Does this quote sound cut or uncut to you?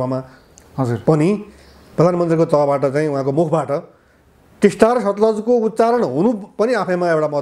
uncut